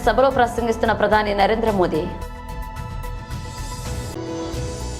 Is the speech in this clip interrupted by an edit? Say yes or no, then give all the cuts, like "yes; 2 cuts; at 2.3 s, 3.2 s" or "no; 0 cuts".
yes; 2 cuts; at 2.1 s, 4.1 s